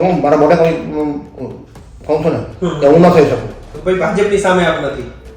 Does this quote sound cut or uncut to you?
cut